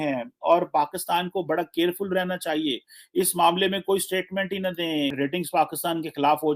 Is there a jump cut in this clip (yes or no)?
yes